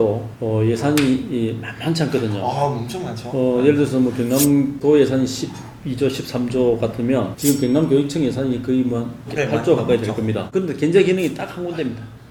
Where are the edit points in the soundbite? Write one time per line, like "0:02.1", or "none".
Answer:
none